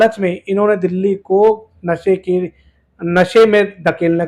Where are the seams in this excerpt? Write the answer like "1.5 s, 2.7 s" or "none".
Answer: none